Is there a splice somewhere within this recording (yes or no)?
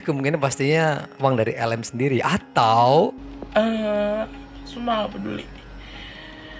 yes